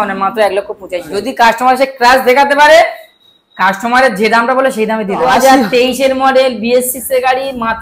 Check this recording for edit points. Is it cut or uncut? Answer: cut